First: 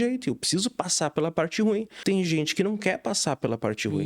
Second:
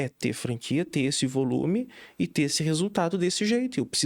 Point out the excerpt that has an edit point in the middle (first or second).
first